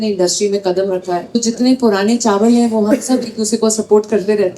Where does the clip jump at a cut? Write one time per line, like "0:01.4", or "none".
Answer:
0:01.4